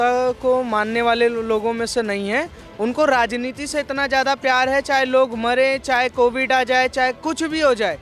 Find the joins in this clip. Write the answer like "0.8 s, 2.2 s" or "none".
none